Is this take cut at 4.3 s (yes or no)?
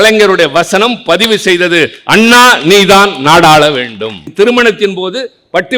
yes